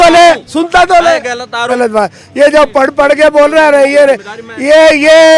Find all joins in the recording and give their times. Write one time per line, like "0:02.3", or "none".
0:01.8